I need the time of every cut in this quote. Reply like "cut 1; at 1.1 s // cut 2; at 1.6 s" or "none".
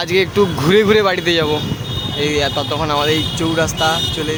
none